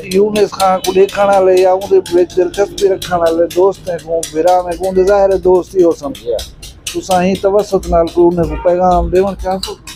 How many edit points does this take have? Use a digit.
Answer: 0